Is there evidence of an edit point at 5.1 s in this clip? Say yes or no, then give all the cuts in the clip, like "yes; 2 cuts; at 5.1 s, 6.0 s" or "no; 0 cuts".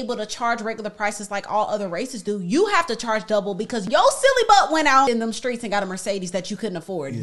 yes; 2 cuts; at 3.8 s, 5.1 s